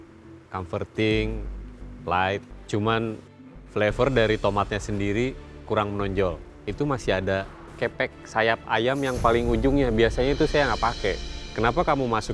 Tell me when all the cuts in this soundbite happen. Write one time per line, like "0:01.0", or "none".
none

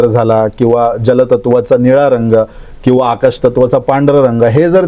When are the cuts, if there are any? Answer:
none

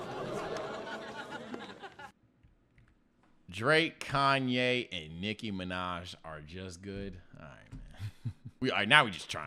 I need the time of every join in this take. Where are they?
0:08.6

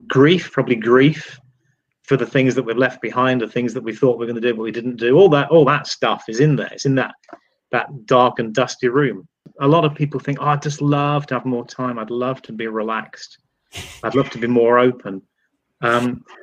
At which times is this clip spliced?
0:09.5

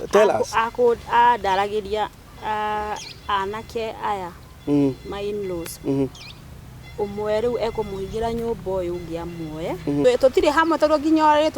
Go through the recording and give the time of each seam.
0:10.0

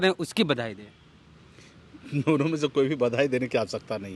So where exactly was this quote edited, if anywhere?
none

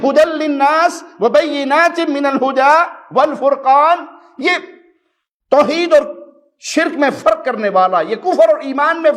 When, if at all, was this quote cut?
none

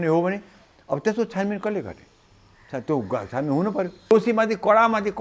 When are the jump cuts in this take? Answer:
0:04.1

